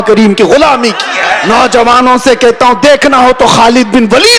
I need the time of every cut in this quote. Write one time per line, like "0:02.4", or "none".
0:01.4

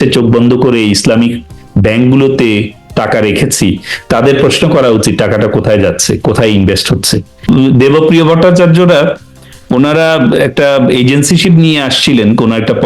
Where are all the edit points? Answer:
0:07.5

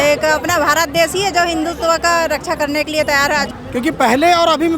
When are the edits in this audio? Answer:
0:03.5

